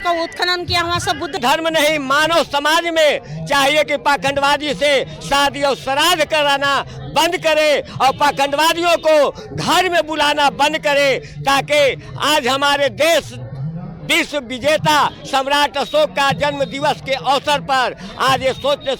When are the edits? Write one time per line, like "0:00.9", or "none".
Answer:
0:01.4